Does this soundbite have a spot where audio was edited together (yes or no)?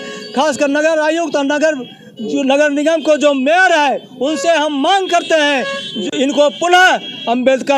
no